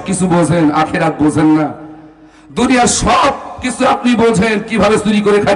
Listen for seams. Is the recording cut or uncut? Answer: uncut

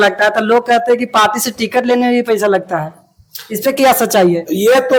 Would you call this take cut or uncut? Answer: uncut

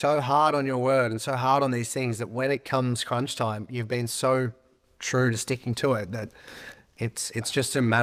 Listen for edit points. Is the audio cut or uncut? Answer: uncut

